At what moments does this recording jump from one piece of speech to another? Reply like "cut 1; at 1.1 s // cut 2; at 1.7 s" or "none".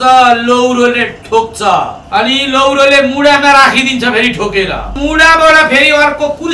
cut 1; at 2.0 s // cut 2; at 5.0 s